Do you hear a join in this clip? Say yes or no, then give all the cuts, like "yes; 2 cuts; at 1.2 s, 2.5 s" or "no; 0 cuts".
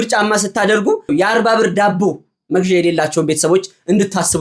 yes; 1 cut; at 1.1 s